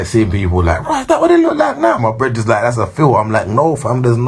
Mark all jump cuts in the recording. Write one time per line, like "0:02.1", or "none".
none